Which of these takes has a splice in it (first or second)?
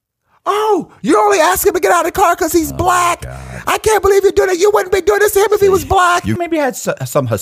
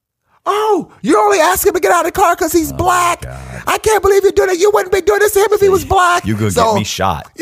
first